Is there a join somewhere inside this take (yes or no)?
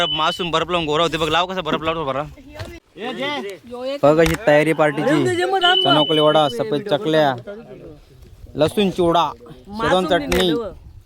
yes